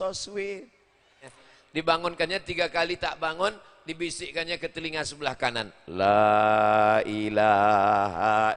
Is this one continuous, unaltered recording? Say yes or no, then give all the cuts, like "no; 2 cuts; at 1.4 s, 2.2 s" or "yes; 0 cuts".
no; 1 cut; at 1.5 s